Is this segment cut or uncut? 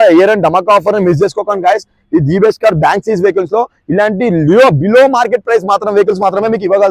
uncut